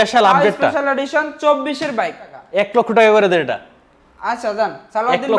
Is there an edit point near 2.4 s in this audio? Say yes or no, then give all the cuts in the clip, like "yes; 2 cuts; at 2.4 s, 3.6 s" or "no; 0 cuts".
yes; 1 cut; at 2.4 s